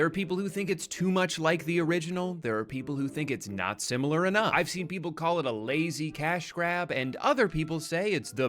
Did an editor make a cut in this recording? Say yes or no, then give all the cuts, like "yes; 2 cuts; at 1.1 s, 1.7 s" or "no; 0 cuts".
yes; 1 cut; at 3.3 s